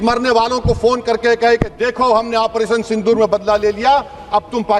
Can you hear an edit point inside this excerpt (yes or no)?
no